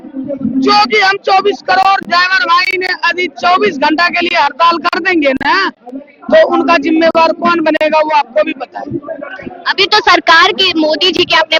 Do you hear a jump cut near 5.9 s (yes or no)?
no